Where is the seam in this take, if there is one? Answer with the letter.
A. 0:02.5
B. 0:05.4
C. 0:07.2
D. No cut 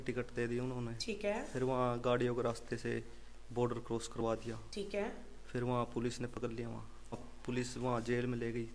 C